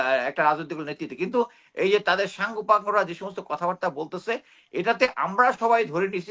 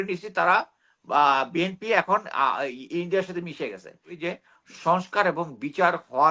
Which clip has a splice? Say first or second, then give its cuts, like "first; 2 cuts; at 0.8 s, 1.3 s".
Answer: second; 1 cut; at 4.1 s